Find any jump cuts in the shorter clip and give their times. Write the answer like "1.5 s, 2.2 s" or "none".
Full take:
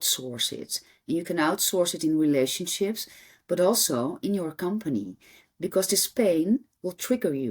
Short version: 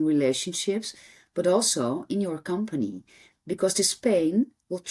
none